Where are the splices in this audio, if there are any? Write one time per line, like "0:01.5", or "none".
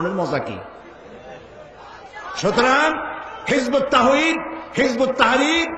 0:02.1